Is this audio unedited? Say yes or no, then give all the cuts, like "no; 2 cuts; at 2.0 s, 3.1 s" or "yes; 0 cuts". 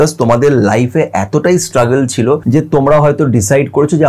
no; 1 cut; at 2.4 s